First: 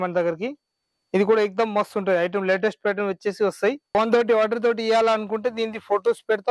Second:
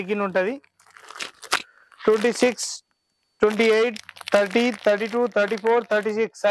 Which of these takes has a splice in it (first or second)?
first